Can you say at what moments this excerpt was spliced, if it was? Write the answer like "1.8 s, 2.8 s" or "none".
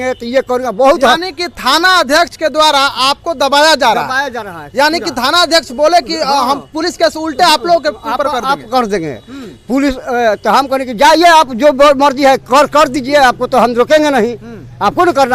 none